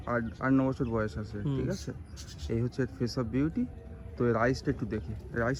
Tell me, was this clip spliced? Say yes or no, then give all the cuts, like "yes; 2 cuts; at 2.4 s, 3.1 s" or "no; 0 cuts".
no; 0 cuts